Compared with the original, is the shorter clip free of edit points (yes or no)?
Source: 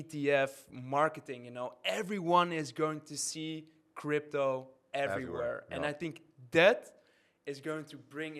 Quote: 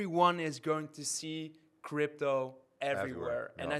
yes